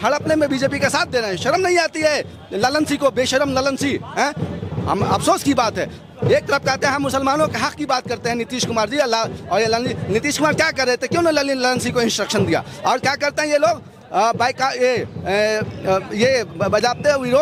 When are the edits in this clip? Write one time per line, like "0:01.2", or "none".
none